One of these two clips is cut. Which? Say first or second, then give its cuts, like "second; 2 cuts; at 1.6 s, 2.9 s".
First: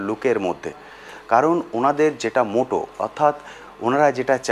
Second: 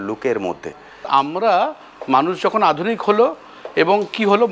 second; 1 cut; at 1.1 s